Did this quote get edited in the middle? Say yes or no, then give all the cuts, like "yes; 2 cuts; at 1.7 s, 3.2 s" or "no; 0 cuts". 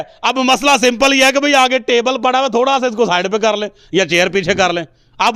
no; 0 cuts